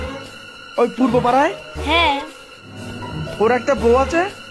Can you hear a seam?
no; 0 cuts

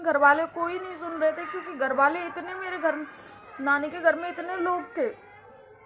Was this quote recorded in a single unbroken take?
yes; 0 cuts

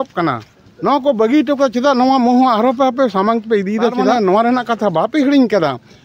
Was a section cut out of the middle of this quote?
yes; 1 cut; at 4.0 s

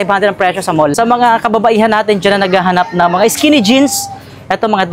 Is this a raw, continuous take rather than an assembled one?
no; 1 cut; at 0.9 s

